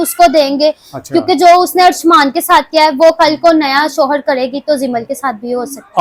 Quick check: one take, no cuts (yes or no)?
yes